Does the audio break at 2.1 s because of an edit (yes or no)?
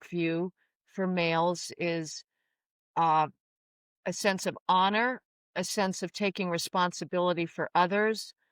no